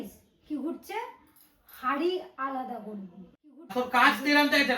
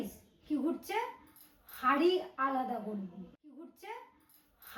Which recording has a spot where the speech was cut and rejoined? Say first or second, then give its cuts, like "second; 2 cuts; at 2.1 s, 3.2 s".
first; 1 cut; at 3.7 s